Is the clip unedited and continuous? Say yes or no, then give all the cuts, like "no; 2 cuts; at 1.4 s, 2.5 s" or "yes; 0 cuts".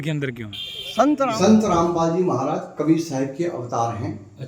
no; 1 cut; at 1.3 s